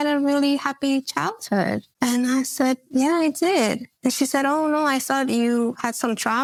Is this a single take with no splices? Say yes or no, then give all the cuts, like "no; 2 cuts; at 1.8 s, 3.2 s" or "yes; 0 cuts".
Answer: yes; 0 cuts